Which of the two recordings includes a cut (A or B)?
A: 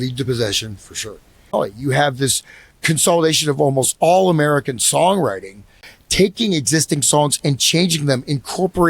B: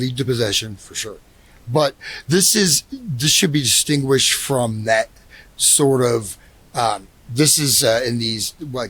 A